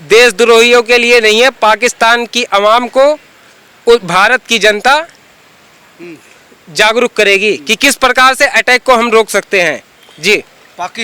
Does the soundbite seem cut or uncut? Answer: uncut